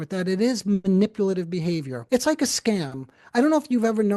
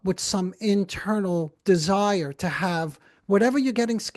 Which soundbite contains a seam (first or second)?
first